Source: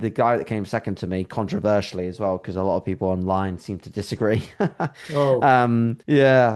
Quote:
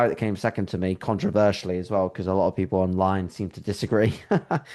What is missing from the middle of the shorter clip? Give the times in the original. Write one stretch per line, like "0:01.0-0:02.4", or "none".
none